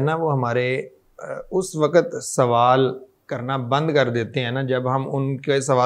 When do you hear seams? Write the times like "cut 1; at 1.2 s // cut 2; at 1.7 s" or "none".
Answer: none